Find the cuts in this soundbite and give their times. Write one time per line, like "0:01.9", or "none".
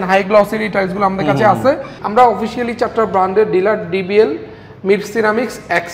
0:01.9